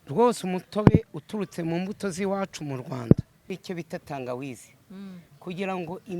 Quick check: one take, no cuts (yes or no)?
no